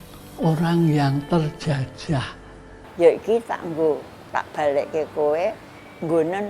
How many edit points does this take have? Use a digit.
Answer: 1